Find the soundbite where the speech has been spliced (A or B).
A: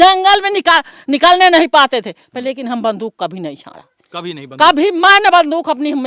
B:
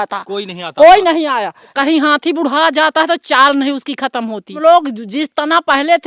B